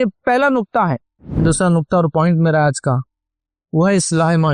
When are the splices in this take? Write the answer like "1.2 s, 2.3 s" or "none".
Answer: 1.4 s